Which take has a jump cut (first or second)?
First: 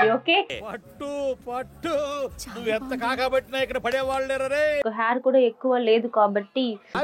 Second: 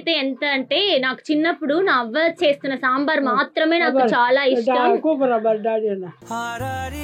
first